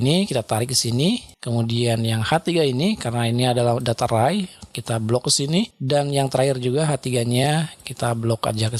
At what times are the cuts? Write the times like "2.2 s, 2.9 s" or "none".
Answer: 1.3 s, 5.8 s